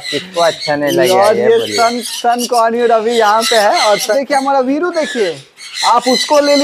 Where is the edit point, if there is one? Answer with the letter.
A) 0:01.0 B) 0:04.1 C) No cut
B